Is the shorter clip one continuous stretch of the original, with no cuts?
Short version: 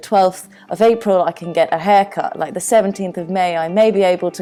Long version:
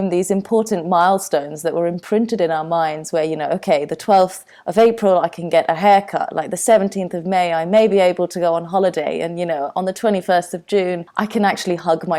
yes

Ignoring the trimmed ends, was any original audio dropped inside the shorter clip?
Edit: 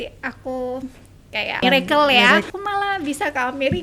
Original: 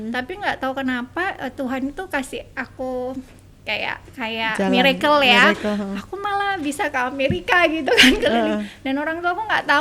yes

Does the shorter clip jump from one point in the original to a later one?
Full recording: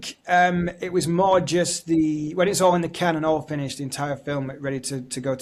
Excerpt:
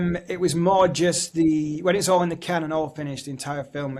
no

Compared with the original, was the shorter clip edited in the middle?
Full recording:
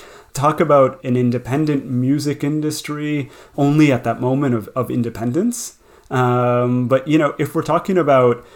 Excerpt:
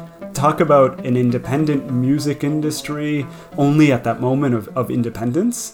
no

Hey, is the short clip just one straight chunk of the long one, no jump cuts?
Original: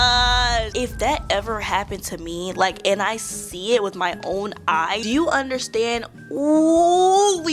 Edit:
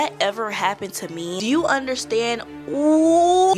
no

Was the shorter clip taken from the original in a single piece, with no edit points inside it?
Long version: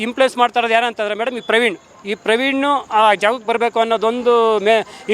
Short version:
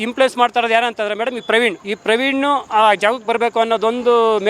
no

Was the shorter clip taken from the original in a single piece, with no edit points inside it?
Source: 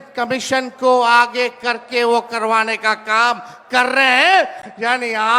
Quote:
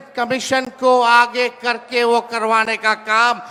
yes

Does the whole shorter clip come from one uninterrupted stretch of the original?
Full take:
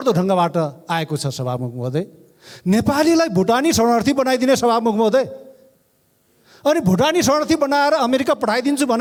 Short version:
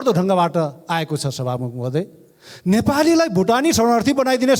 yes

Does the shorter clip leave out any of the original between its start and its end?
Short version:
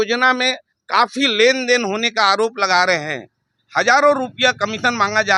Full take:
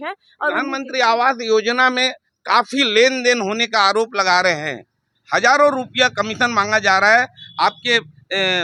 no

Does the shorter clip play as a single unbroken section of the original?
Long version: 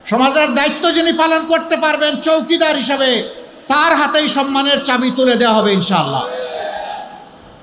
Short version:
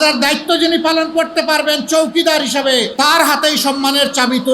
no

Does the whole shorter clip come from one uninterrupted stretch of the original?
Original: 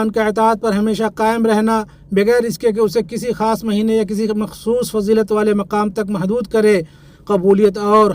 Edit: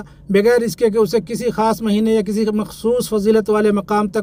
yes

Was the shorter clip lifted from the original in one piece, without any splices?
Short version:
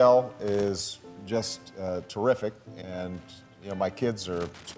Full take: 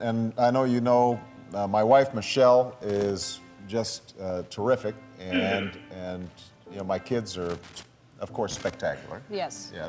no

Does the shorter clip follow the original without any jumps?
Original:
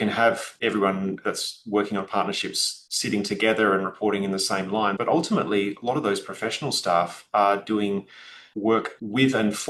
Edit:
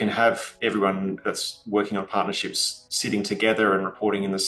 yes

